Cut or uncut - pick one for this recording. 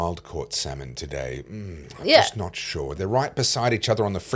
uncut